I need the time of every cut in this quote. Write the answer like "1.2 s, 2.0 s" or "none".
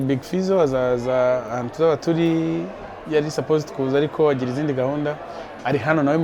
none